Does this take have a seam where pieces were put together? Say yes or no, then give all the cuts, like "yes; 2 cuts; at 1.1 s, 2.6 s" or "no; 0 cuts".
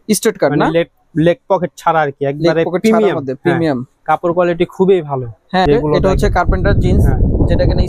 yes; 1 cut; at 5.7 s